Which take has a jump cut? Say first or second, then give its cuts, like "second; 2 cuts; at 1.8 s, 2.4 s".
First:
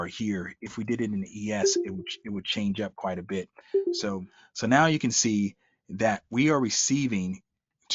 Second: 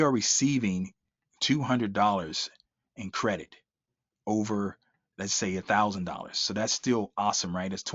first; 1 cut; at 4.3 s